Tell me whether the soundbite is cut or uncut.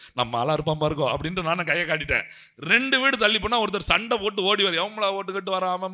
uncut